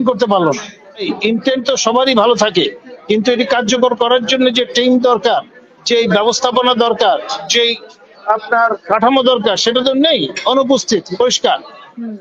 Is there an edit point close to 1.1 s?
yes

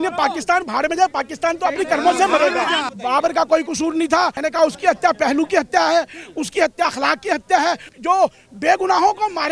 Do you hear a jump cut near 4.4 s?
yes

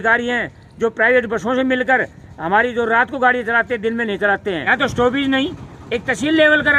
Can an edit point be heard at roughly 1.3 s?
no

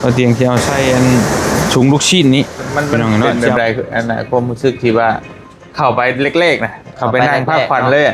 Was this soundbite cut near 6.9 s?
no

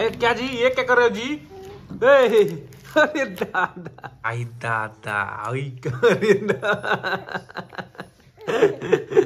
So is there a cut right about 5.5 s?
no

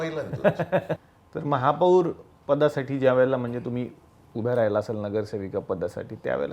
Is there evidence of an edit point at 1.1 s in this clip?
yes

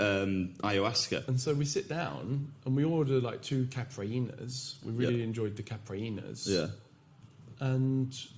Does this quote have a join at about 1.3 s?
yes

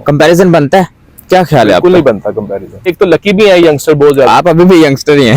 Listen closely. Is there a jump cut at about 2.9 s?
yes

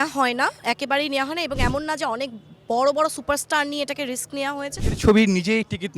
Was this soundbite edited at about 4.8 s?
yes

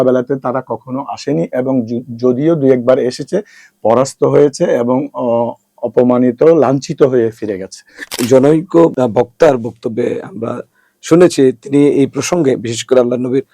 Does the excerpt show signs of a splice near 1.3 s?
no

